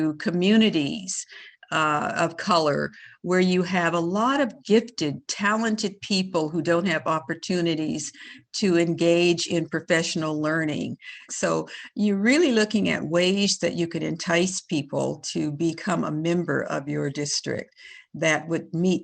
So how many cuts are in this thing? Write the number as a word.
one